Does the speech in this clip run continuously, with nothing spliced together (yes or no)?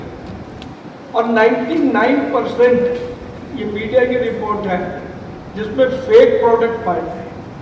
yes